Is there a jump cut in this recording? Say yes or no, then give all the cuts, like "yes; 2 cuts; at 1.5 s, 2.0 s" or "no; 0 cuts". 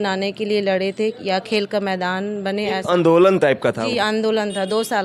no; 0 cuts